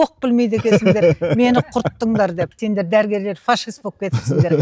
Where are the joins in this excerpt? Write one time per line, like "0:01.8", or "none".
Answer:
0:02.5